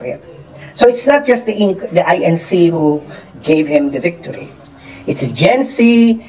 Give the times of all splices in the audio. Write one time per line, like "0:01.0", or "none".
none